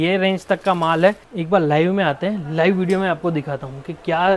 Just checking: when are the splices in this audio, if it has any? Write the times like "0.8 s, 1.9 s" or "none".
1.3 s